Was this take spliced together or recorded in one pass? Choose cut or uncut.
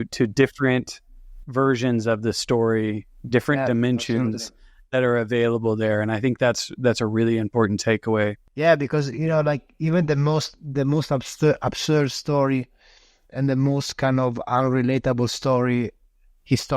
cut